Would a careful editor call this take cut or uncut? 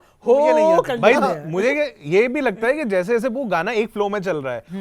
uncut